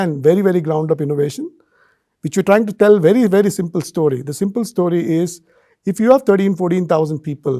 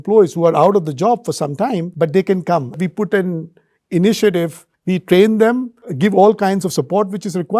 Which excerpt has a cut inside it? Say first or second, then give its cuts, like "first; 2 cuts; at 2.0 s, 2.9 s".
second; 3 cuts; at 1.9 s, 2.8 s, 4.8 s